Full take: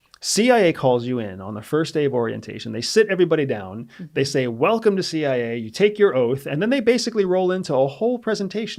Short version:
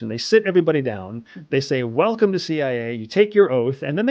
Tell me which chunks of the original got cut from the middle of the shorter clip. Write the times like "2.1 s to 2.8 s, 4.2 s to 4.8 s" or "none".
none